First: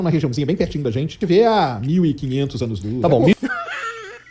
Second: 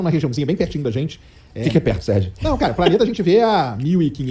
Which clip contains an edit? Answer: first; 1 cut; at 1.2 s

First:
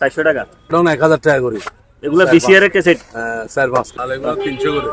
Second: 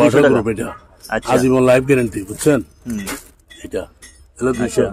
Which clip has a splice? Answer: first; 2 cuts; at 0.7 s, 3.5 s

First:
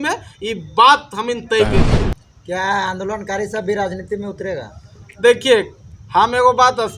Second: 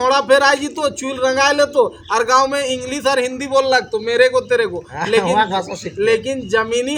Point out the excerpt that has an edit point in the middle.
first; 1 cut; at 1.9 s

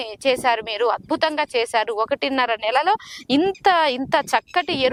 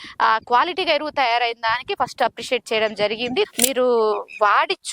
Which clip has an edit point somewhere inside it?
second; 1 cut; at 3.5 s

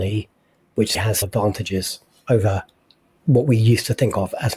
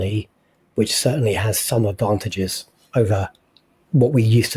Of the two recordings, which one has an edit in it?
first; 1 cut; at 1.2 s

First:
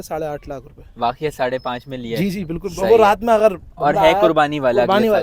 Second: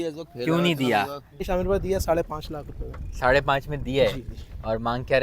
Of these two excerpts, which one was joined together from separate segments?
second; 1 cut; at 1.5 s

